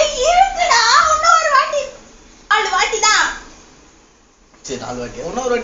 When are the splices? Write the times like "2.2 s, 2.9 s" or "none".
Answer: 2.5 s

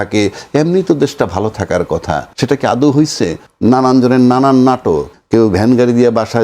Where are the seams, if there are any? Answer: 2.3 s, 3.4 s, 5.1 s

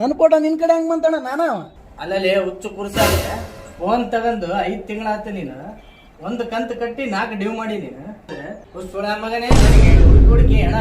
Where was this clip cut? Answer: 8.3 s

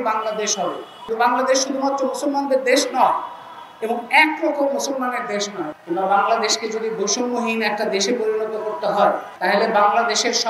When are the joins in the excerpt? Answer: 1.0 s, 5.6 s

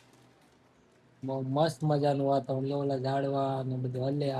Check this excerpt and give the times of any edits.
none

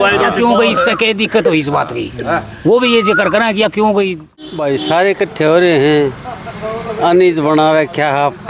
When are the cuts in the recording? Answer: 4.5 s

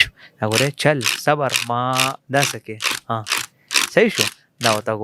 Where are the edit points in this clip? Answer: none

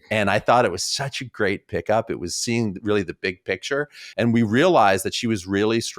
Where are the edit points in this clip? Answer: 4.0 s

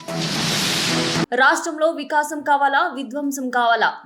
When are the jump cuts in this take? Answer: 1.3 s

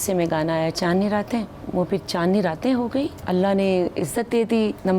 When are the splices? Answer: 1.6 s, 3.2 s

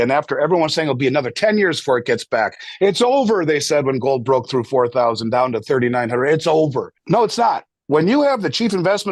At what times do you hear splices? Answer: 6.9 s

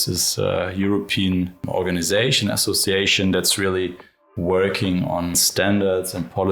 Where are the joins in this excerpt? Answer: 1.6 s, 5.4 s

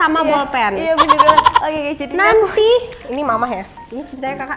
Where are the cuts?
0.8 s, 1.6 s

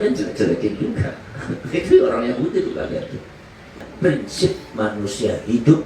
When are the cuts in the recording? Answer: 3.9 s

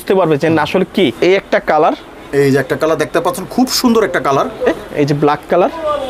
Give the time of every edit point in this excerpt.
1.1 s, 4.8 s

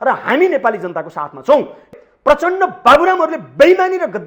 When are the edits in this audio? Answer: 1.9 s

